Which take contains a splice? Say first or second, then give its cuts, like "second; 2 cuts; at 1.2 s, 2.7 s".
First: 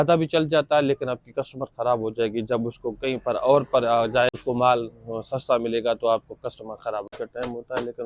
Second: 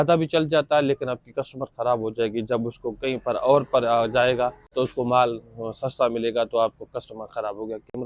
first; 2 cuts; at 4.3 s, 7.1 s